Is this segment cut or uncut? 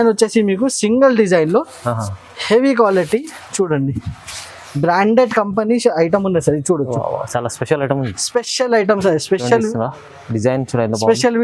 uncut